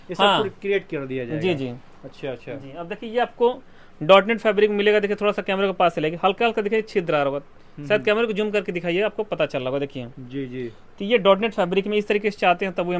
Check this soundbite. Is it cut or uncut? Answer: uncut